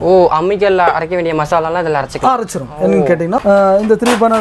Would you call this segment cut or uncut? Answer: cut